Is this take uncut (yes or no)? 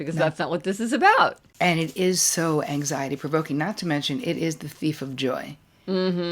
no